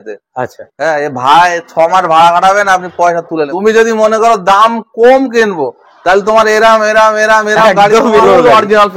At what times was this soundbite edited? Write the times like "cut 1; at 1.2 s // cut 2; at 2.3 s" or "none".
cut 1; at 3.5 s // cut 2; at 8.2 s